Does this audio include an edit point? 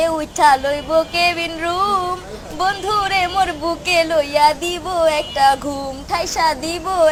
no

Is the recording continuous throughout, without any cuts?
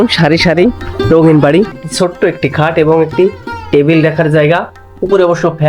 no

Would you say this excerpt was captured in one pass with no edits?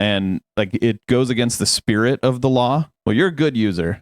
no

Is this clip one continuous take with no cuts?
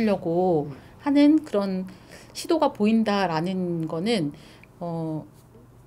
yes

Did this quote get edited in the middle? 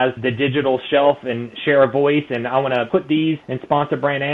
yes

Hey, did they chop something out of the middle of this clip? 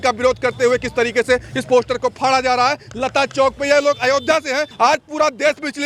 no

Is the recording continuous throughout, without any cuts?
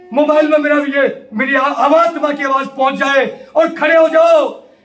yes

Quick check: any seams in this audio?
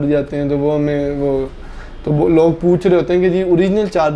no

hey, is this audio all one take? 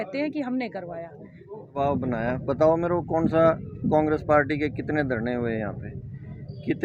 no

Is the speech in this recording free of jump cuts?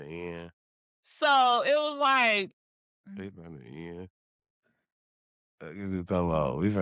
yes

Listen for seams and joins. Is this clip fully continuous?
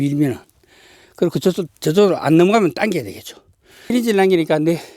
no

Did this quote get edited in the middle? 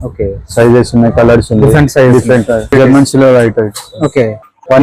yes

